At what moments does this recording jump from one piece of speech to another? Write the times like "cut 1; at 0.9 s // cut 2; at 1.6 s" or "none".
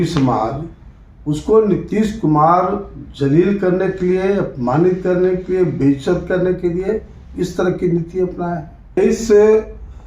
cut 1; at 9.0 s